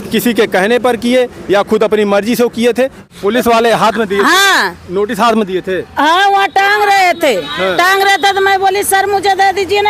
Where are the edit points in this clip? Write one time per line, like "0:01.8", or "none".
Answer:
0:03.0